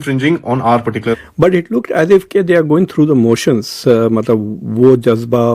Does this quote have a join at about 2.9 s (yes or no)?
no